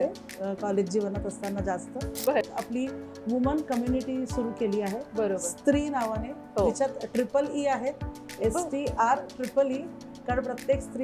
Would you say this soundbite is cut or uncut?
cut